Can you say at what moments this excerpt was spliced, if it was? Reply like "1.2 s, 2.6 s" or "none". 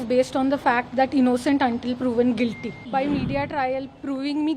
2.8 s